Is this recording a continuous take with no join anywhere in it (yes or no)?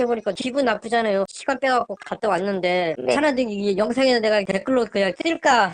no